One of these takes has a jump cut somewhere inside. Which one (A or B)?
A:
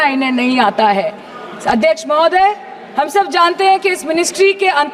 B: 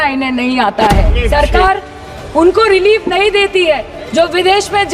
B